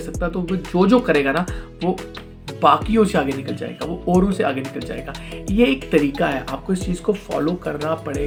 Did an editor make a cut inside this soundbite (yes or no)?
no